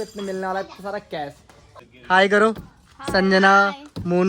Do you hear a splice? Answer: yes; 1 cut; at 1.8 s

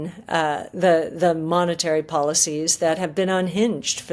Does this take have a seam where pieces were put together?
no; 0 cuts

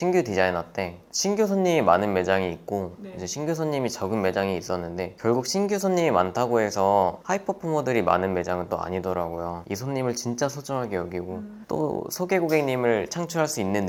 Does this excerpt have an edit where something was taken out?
no; 0 cuts

